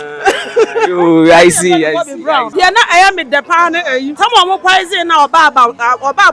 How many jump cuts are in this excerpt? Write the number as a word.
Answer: two